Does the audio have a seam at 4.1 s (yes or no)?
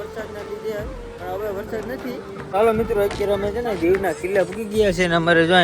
no